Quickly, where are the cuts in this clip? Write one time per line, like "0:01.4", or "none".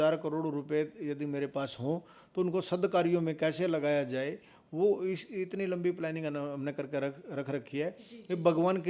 none